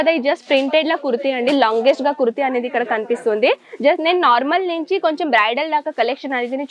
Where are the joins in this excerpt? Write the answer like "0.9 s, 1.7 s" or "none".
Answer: none